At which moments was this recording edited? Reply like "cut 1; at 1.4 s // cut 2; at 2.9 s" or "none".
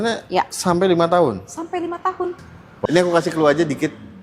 cut 1; at 2.9 s